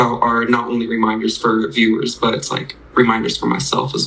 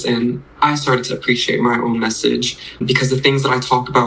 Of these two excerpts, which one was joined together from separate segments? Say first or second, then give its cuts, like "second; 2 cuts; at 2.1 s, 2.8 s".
second; 1 cut; at 2.8 s